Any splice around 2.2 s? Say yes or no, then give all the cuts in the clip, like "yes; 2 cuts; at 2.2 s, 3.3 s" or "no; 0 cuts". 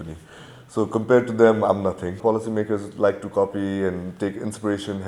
yes; 1 cut; at 2.2 s